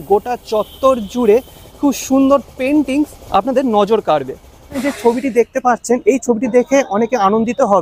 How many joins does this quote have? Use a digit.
1